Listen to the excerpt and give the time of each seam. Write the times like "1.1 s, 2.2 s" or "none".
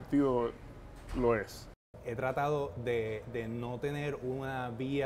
1.7 s